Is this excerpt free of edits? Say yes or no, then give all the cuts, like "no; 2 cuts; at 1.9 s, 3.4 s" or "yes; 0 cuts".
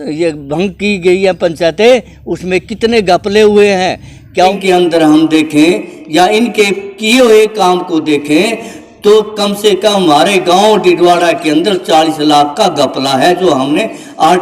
no; 1 cut; at 4.5 s